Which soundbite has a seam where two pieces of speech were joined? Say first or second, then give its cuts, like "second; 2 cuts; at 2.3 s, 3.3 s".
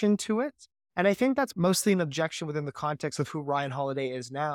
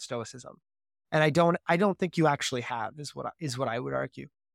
first; 1 cut; at 1.5 s